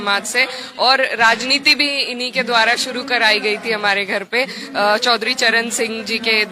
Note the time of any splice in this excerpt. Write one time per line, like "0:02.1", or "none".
none